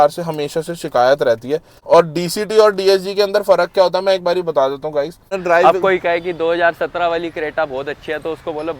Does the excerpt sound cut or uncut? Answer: cut